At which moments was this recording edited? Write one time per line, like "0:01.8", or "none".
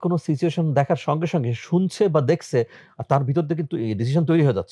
none